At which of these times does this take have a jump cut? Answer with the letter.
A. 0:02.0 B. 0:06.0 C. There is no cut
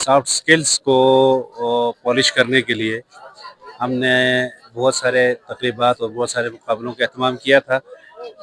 C